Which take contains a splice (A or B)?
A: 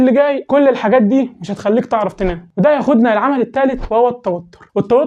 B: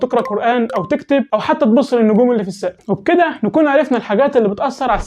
B